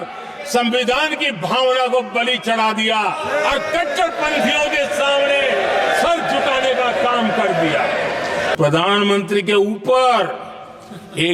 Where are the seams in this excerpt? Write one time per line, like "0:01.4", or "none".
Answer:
0:08.5